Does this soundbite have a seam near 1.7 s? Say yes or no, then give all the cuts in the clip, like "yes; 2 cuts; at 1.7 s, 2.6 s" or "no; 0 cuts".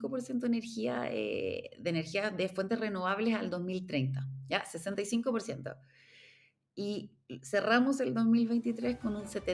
no; 0 cuts